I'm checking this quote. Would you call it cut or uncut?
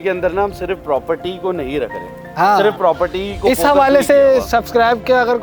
uncut